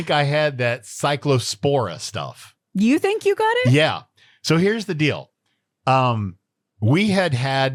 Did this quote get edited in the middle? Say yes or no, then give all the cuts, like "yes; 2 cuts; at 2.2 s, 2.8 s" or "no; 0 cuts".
no; 0 cuts